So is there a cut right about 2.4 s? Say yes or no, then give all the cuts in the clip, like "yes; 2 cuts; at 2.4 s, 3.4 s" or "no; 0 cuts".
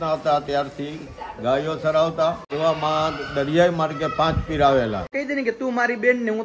yes; 2 cuts; at 2.4 s, 5.1 s